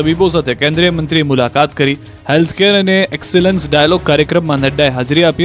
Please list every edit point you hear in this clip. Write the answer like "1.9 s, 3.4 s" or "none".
none